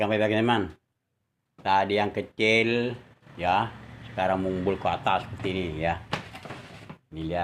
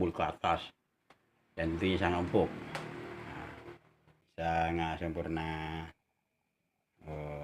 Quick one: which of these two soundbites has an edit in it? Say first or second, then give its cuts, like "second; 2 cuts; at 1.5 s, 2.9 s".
second; 1 cut; at 4.2 s